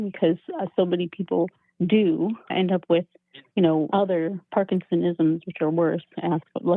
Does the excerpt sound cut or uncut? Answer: cut